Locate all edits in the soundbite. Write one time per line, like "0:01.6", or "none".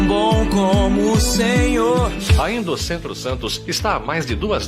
0:02.2

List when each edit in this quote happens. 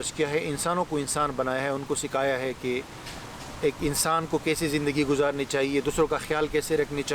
none

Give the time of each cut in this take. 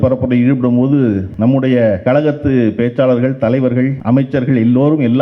0:01.3
0:02.0
0:04.0

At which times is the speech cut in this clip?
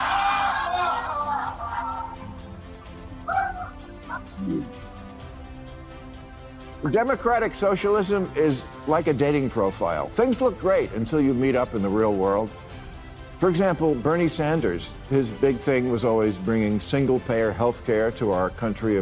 none

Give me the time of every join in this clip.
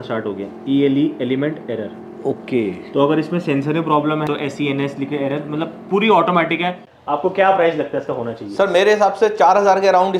0:04.3
0:06.9

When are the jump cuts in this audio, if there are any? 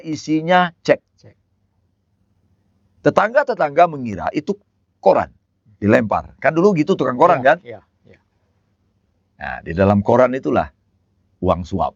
none

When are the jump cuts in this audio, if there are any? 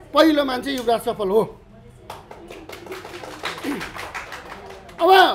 none

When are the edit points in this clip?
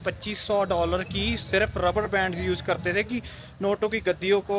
none

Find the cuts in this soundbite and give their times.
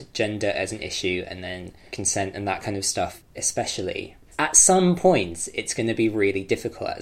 0:01.8
0:03.2
0:04.2

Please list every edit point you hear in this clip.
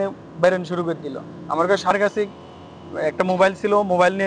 0:01.9

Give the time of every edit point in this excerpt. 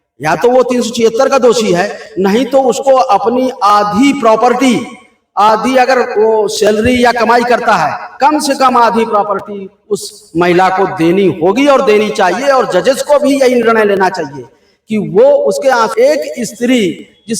0:15.9

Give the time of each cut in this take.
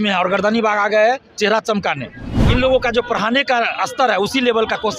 0:02.3

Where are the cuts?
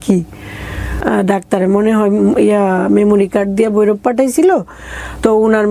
0:01.0

